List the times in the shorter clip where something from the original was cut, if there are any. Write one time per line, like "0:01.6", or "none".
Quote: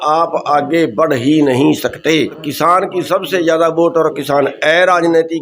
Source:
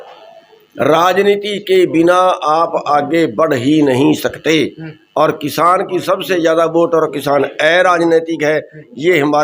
0:02.5